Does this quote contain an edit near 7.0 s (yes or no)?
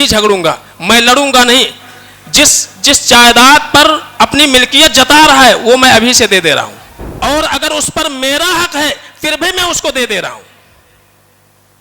yes